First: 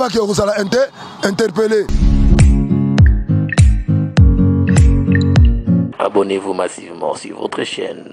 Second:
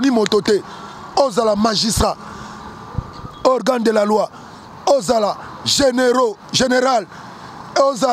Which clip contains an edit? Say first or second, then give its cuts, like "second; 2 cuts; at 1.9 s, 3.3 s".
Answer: first; 1 cut; at 1.9 s